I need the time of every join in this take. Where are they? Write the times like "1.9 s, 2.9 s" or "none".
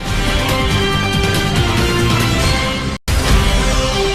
none